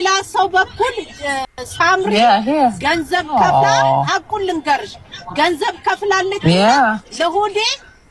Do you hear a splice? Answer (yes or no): no